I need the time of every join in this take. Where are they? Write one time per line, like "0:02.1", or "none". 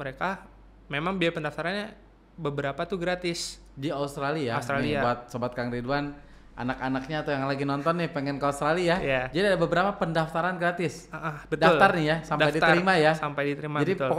none